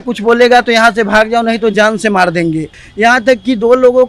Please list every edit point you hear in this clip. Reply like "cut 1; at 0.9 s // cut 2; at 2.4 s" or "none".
cut 1; at 2.8 s